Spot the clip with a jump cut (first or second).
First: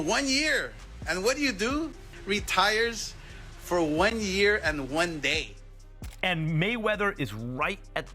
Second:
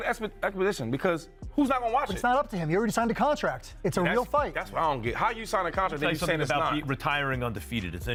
first